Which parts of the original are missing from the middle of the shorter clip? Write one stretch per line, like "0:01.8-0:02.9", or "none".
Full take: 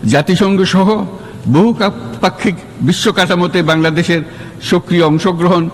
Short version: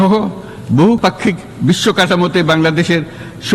0:01.7-0:02.2